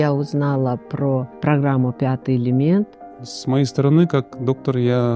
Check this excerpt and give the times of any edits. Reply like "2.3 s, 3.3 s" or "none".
1.3 s, 3.0 s